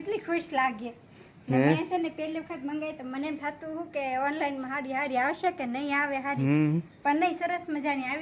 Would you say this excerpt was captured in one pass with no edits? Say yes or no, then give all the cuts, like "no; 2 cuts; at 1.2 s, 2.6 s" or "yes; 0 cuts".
yes; 0 cuts